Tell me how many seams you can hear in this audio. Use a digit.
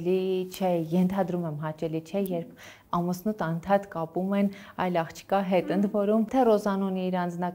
1